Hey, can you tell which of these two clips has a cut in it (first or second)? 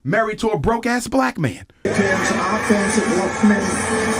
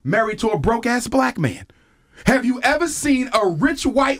first